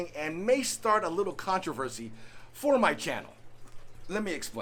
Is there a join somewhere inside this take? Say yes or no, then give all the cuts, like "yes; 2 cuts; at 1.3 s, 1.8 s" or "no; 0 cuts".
no; 0 cuts